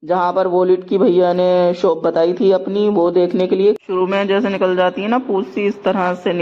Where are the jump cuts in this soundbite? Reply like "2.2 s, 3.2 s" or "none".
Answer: 3.8 s, 5.5 s